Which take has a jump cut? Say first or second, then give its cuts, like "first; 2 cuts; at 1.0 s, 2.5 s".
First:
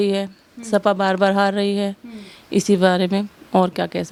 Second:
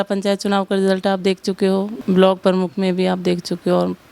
second; 1 cut; at 2.0 s